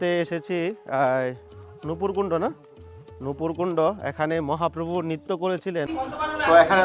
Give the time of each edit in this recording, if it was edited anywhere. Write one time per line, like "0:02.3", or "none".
0:05.9